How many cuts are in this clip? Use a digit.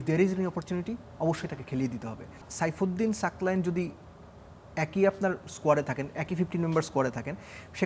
1